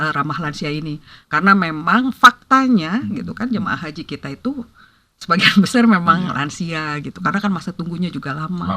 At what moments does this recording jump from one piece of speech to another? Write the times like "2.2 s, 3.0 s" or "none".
none